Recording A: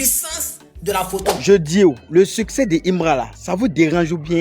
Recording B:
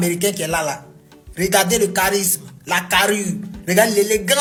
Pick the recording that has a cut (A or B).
A